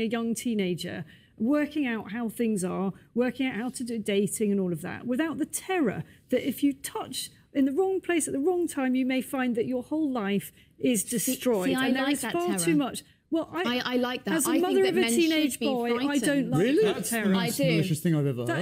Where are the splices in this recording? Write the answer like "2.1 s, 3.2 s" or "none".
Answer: 14.4 s